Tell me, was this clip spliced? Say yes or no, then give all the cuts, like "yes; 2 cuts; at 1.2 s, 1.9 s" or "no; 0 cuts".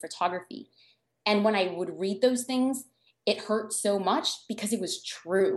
no; 0 cuts